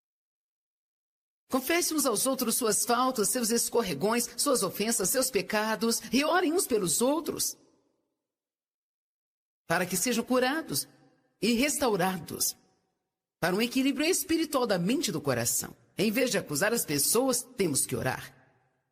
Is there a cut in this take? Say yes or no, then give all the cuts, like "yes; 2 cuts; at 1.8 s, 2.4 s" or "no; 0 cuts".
no; 0 cuts